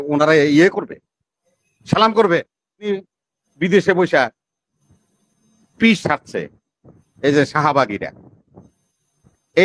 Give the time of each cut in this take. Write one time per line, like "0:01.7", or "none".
0:02.9